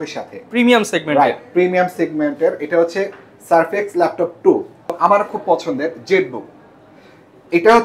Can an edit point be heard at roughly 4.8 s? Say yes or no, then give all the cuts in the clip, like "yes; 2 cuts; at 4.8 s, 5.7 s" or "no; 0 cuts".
yes; 1 cut; at 4.8 s